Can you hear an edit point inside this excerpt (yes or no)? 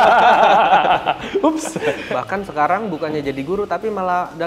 yes